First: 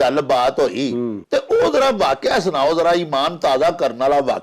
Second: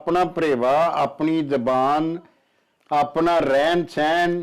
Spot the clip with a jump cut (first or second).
first